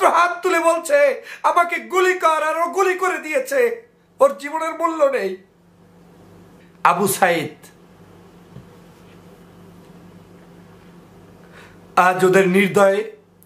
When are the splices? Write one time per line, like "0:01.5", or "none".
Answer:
0:06.6